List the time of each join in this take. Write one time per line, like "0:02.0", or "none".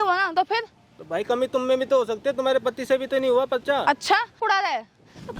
0:04.4

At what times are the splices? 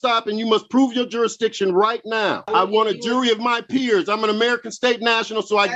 0:02.5

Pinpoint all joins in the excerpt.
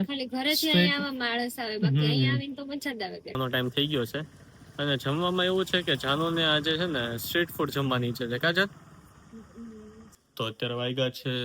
0:03.4
0:10.2

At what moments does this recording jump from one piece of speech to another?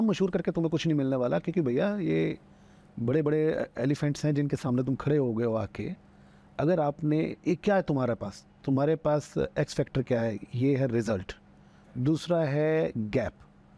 none

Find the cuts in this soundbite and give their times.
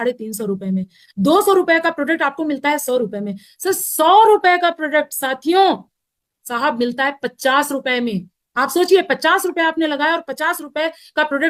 none

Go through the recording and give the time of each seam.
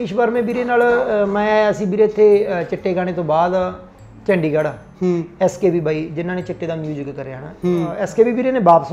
0:07.9

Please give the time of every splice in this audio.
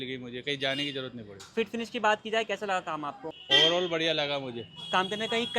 0:03.3

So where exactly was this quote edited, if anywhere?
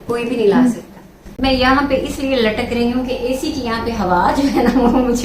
0:01.3

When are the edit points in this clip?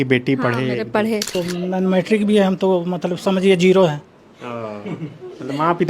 0:01.3

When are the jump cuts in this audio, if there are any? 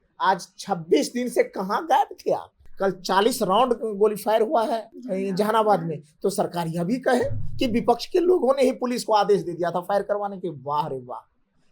0:02.6
0:05.0

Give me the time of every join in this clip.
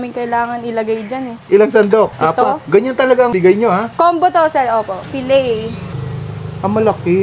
0:02.1
0:03.6
0:05.1

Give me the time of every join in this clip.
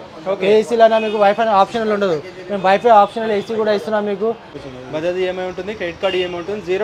0:04.5

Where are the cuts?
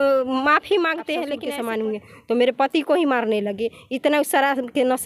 0:01.4

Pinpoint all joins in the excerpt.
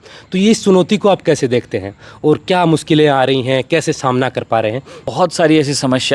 0:05.0

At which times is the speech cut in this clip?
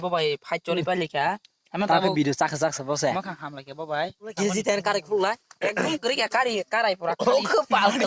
0:04.4

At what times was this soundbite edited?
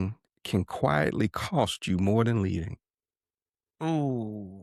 none

